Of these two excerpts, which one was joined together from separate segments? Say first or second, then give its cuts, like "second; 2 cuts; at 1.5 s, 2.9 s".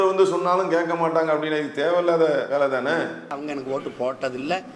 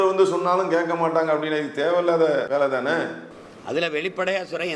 first; 1 cut; at 3.4 s